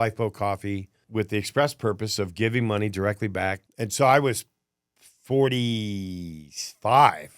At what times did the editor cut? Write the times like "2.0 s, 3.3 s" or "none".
1.0 s, 3.6 s